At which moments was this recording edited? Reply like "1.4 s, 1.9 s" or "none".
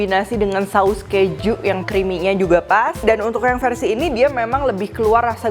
1.8 s, 3.0 s